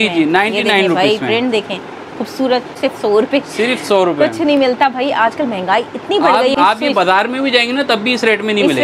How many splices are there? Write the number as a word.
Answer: two